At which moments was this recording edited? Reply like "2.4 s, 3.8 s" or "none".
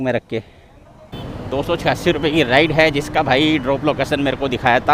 1.2 s